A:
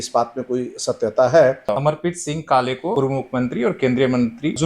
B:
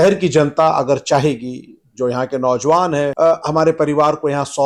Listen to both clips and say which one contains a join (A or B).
A